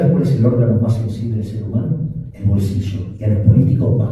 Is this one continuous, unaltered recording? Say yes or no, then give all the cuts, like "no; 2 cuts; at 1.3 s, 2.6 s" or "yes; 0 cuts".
no; 1 cut; at 2.3 s